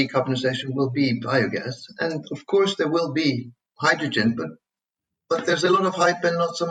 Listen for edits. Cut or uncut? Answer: uncut